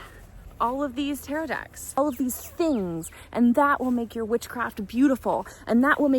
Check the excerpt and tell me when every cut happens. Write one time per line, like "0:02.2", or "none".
0:02.0